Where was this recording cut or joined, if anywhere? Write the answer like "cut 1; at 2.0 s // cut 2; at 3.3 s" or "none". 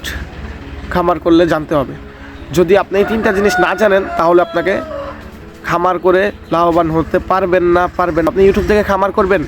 cut 1; at 8.3 s